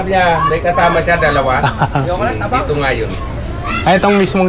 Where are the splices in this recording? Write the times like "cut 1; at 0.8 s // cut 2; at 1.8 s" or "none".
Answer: none